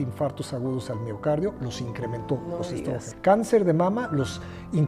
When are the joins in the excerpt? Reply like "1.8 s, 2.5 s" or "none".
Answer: 3.1 s